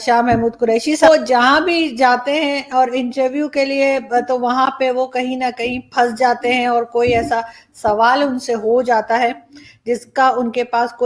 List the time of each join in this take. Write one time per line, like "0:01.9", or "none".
0:01.0